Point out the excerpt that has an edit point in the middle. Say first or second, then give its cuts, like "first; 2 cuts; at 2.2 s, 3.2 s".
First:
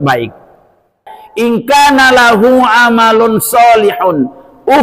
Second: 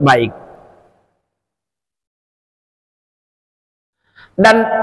first; 1 cut; at 1.2 s